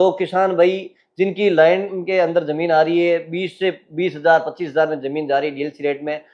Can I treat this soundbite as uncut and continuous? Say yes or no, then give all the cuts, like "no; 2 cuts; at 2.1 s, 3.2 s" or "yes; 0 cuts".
yes; 0 cuts